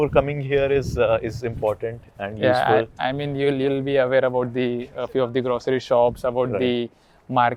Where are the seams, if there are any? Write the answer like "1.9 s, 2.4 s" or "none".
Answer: none